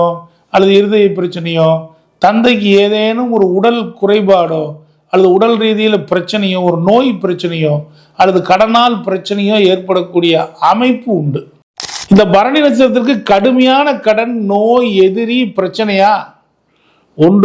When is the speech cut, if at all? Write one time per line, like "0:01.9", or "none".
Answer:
0:11.9